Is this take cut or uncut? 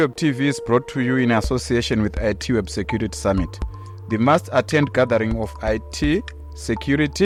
uncut